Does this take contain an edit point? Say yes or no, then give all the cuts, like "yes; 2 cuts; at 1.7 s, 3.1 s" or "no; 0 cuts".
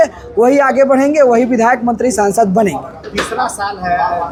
no; 0 cuts